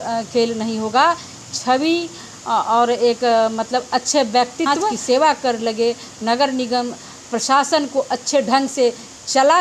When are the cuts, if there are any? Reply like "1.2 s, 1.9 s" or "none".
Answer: 4.9 s